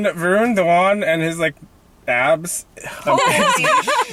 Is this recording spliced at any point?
no; 0 cuts

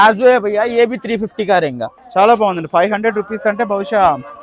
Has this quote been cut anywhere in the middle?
yes; 1 cut; at 1.9 s

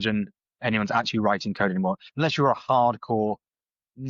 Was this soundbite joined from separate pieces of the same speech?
no; 0 cuts

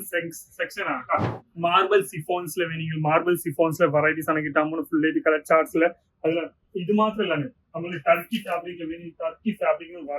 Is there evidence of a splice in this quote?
yes; 1 cut; at 1.4 s

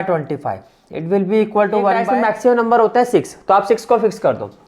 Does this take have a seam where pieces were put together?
yes; 1 cut; at 2.1 s

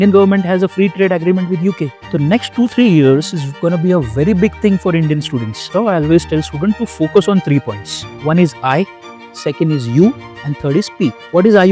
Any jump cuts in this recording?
yes; 2 cuts; at 1.9 s, 5.6 s

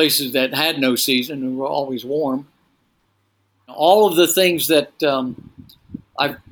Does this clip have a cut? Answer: yes; 1 cut; at 3.7 s

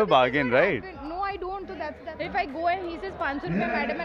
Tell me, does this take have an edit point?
yes; 1 cut; at 2.0 s

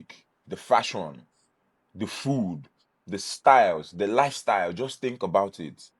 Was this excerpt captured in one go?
yes; 0 cuts

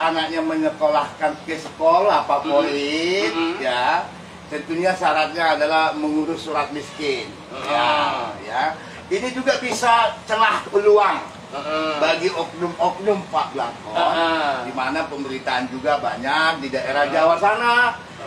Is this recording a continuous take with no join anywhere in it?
yes; 0 cuts

